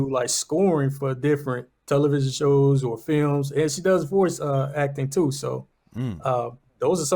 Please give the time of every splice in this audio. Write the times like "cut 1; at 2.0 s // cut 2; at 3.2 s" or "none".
cut 1; at 1.7 s